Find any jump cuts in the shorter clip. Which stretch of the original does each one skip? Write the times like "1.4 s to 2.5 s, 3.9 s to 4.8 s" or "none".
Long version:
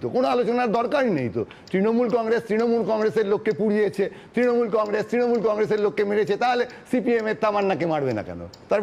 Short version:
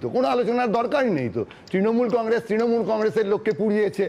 none